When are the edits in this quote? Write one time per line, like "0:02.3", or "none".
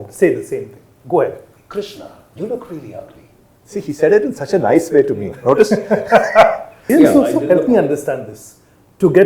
0:06.7